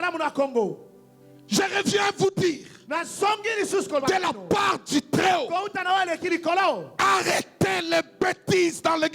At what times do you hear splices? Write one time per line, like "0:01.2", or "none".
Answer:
none